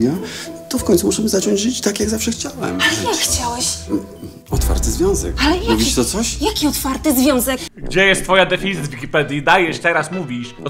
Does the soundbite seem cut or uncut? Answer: uncut